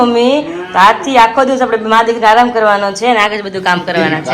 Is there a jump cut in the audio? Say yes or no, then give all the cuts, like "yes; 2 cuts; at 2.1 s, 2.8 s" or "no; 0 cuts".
no; 0 cuts